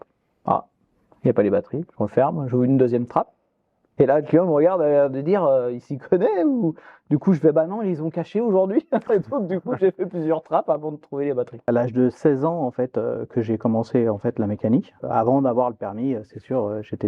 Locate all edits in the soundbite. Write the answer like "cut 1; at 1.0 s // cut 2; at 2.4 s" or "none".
cut 1; at 11.7 s // cut 2; at 15.0 s

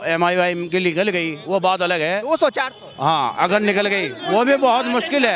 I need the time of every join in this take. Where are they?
none

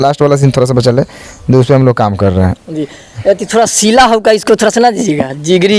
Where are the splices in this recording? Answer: none

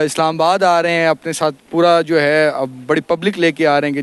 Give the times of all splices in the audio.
none

